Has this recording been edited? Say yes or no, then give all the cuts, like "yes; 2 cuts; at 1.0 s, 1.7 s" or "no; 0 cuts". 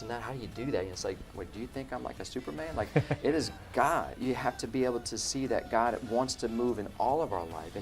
yes; 1 cut; at 4.1 s